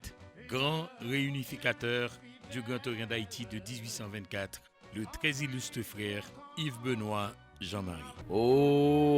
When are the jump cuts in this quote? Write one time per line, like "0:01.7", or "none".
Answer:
0:08.1